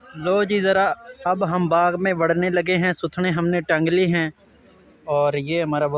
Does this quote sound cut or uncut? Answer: uncut